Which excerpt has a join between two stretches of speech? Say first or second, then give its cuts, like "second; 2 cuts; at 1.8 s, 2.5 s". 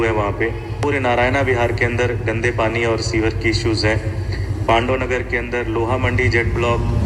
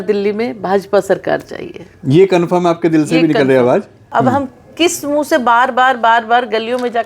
second; 1 cut; at 4.0 s